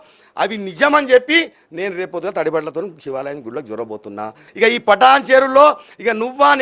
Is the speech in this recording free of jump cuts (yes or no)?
no